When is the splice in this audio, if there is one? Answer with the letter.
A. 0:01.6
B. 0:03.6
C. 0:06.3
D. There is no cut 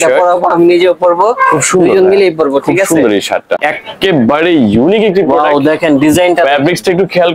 B